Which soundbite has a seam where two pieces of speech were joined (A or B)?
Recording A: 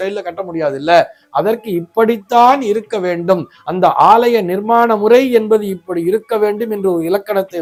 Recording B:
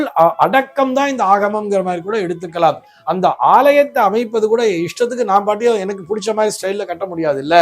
B